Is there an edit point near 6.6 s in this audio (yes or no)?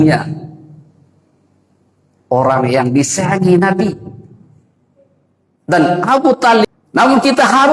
yes